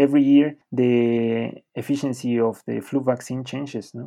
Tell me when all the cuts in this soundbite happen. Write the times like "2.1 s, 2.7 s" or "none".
1.1 s